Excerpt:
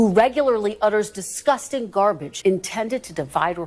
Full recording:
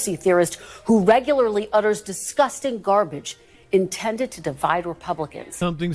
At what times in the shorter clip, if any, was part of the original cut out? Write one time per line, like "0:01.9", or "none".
0:02.3